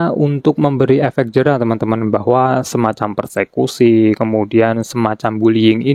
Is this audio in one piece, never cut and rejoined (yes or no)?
yes